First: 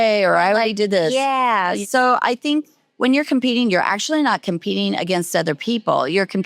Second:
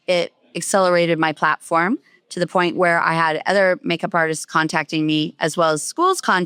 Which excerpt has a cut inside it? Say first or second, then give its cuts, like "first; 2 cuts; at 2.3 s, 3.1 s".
first; 1 cut; at 1.8 s